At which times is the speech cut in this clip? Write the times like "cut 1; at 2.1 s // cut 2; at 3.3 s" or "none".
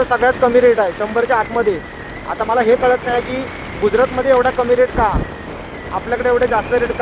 cut 1; at 5.5 s